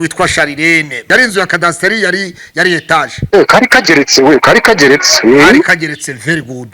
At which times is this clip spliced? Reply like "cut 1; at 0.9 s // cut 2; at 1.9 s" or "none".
cut 1; at 1.0 s // cut 2; at 3.2 s